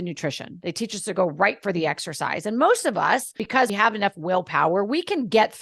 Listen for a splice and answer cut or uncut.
cut